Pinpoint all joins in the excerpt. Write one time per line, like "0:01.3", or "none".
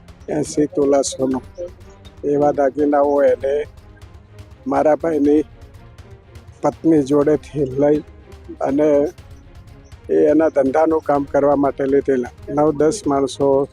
0:12.4